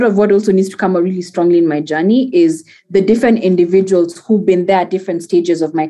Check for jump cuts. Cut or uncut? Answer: uncut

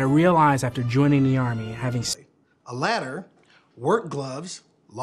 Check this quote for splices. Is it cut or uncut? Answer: cut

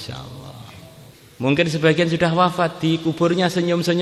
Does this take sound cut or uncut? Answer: cut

